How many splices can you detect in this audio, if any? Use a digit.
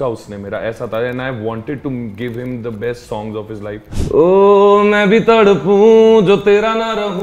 1